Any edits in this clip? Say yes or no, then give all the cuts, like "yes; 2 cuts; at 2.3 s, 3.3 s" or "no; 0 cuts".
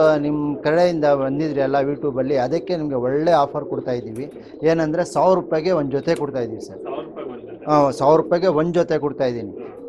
no; 0 cuts